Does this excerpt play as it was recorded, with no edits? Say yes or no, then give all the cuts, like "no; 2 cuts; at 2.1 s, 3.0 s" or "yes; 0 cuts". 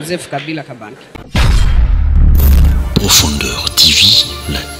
no; 1 cut; at 1.2 s